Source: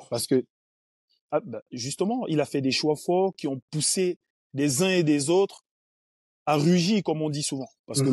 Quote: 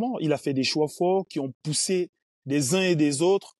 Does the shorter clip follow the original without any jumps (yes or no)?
yes